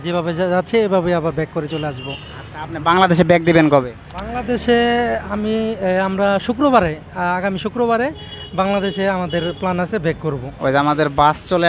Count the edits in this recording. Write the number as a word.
zero